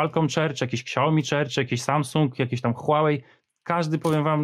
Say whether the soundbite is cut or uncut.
uncut